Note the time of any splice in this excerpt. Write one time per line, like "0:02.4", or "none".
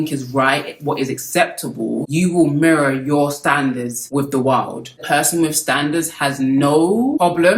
0:05.0